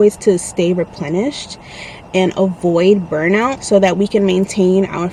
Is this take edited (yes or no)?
no